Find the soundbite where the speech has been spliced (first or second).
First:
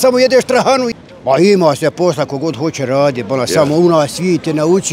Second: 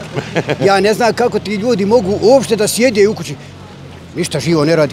first